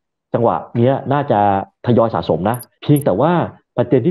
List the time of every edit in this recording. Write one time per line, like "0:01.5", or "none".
0:02.7